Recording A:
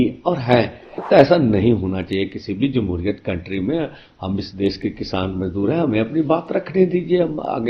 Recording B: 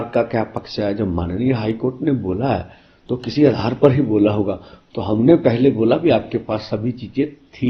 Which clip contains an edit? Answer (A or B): A